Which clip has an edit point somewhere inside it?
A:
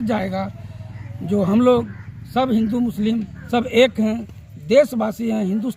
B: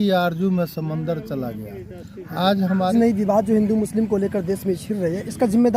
B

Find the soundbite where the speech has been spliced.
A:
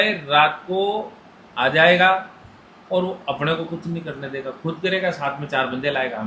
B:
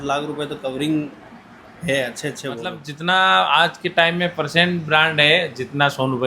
B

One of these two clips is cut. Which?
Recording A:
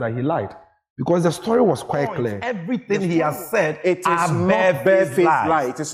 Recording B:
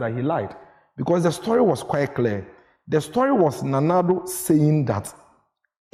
A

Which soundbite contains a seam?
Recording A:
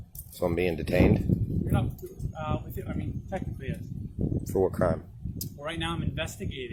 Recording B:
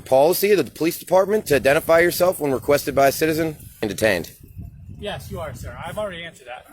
B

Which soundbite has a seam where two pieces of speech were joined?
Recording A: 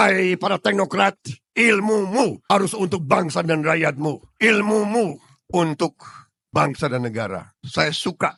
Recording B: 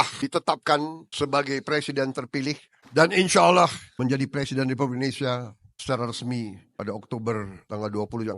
B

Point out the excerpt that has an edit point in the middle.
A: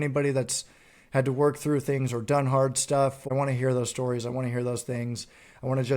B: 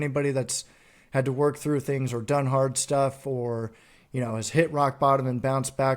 A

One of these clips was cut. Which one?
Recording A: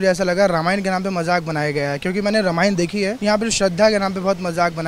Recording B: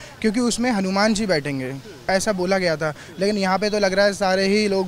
A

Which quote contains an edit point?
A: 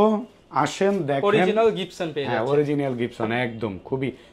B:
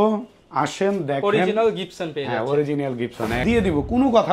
B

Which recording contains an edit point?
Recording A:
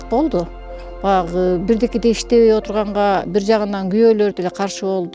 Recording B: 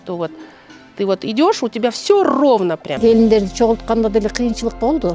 B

